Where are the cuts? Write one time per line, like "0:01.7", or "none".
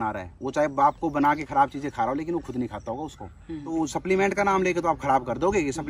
0:03.6